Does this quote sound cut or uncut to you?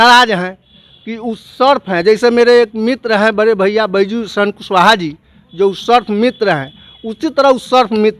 uncut